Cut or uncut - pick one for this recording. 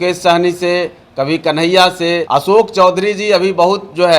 cut